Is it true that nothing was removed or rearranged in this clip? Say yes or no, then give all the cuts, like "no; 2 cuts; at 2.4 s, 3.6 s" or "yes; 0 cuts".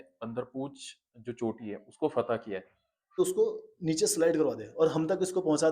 no; 1 cut; at 3.2 s